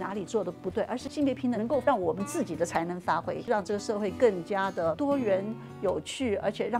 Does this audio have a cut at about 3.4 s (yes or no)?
yes